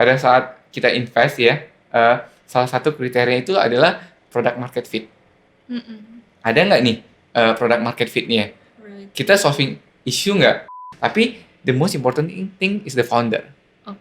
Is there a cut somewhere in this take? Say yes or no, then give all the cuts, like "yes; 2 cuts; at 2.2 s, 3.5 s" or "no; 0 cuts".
yes; 1 cut; at 10.8 s